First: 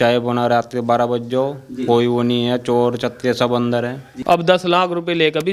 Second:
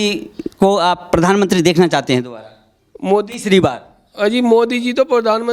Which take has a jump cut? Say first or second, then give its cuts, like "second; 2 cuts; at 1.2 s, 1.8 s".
first; 1 cut; at 4.1 s